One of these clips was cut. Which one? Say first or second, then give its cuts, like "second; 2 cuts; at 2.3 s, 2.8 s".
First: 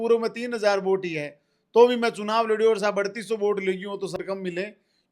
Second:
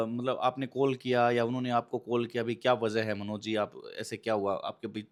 first; 1 cut; at 4.2 s